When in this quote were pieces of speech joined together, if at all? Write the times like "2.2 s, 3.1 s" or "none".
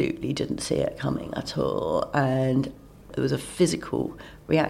3.1 s